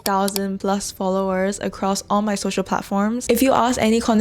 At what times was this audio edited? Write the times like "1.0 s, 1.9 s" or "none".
3.2 s

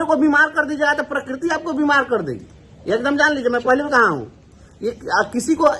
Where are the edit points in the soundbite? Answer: none

